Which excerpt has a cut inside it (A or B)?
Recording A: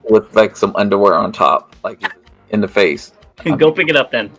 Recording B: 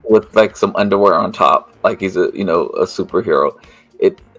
A